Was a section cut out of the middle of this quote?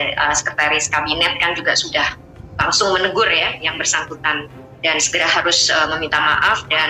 no; 0 cuts

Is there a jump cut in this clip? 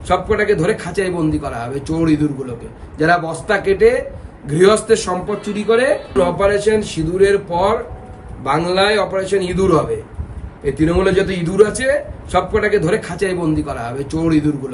yes; 1 cut; at 6.1 s

